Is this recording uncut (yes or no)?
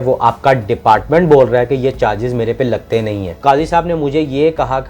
no